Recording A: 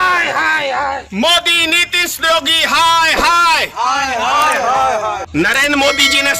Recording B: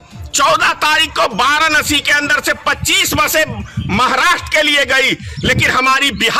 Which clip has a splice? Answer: A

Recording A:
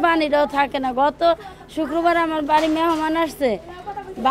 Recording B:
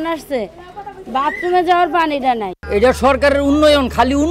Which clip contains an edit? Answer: B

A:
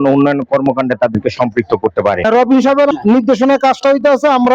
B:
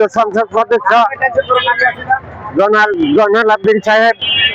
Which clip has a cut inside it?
A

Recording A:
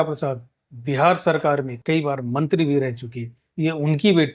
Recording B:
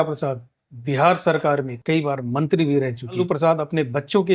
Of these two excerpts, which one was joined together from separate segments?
B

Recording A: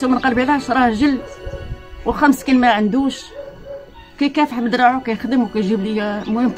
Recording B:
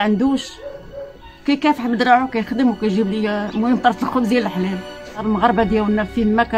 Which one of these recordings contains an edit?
B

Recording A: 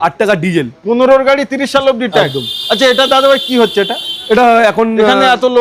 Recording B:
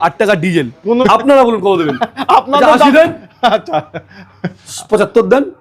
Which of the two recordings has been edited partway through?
B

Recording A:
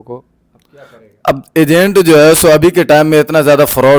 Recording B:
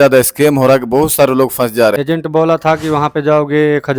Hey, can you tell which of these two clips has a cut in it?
B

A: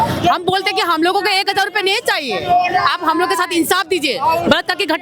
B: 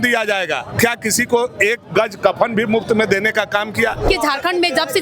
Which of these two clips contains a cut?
B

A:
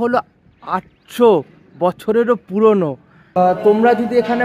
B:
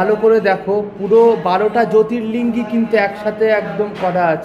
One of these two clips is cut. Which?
A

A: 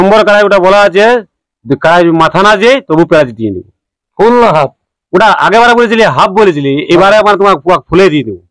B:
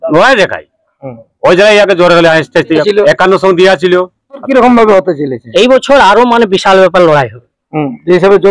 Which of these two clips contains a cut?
B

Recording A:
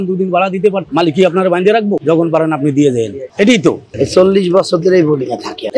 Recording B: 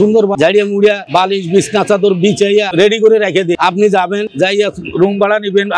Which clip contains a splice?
A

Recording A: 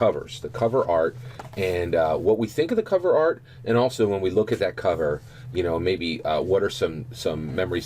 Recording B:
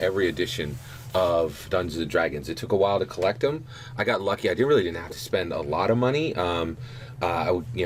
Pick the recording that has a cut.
A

